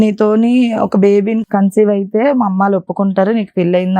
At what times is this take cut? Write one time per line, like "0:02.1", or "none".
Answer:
0:01.4